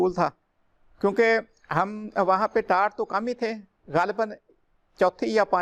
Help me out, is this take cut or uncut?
uncut